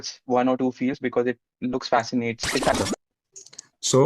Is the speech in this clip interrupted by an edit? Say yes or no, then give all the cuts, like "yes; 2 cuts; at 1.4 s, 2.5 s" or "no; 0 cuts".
yes; 1 cut; at 2.8 s